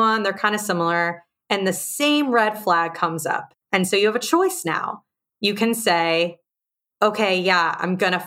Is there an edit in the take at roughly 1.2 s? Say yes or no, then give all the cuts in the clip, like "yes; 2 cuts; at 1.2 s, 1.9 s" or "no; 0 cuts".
no; 1 cut; at 3.5 s